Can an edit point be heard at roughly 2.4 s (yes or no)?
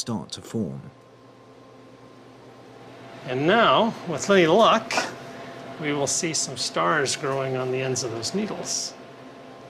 no